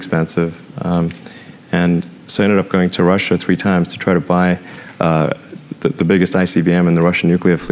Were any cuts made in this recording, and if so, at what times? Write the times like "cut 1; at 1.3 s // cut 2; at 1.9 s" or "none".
none

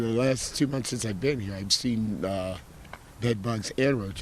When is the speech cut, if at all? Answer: none

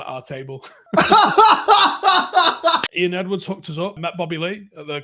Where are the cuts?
cut 1; at 2.9 s

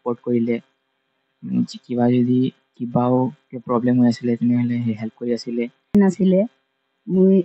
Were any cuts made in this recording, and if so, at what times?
cut 1; at 5.9 s

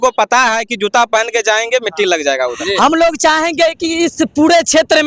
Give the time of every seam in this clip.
cut 1; at 2.5 s

